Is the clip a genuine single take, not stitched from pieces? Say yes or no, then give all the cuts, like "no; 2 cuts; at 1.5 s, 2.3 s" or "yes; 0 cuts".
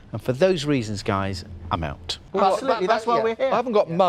no; 1 cut; at 2.3 s